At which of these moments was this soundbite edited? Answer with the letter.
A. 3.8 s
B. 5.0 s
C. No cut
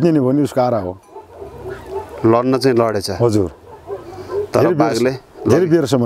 C